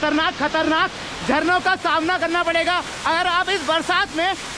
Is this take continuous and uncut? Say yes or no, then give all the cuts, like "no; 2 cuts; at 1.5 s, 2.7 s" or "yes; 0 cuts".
yes; 0 cuts